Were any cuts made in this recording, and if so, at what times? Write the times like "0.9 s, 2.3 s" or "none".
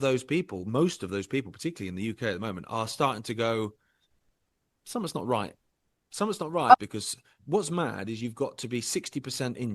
6.7 s